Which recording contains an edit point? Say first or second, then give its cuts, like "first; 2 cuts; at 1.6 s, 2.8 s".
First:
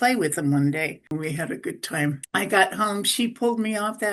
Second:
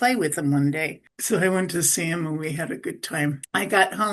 first; 1 cut; at 1.1 s